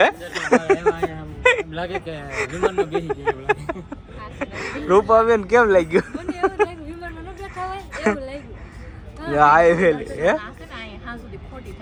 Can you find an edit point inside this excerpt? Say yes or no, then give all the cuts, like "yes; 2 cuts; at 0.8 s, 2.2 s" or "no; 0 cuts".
no; 0 cuts